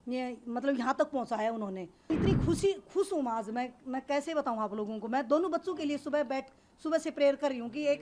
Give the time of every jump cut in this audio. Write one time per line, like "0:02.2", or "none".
0:02.1

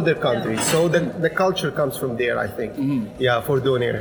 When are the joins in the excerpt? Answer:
none

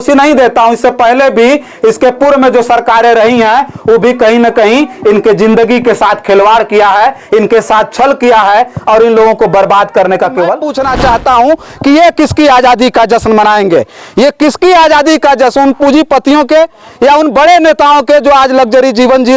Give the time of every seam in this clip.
0:10.7

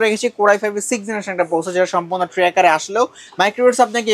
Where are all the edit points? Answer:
none

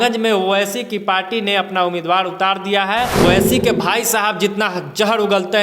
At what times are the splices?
0:03.1

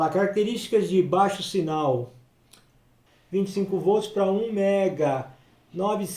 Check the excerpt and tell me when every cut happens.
0:03.0

